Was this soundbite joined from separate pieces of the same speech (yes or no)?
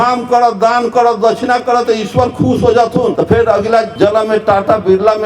yes